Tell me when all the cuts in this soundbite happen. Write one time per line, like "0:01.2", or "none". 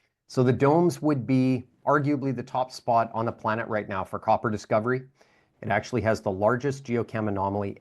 0:05.4